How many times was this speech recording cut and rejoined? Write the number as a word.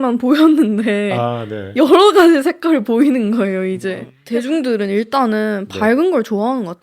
one